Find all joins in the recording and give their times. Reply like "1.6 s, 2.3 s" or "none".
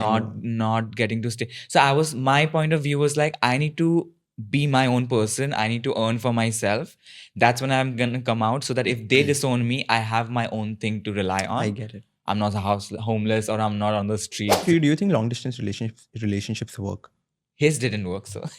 14.6 s